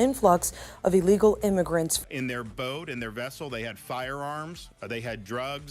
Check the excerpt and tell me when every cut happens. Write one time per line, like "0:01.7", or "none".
0:02.0